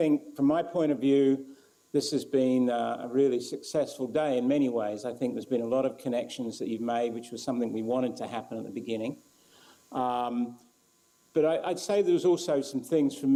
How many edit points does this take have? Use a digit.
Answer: 0